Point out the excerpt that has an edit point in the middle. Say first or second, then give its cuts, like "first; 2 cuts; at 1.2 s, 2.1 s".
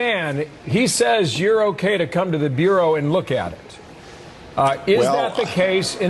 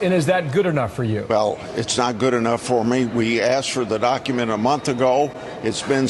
second; 1 cut; at 1.3 s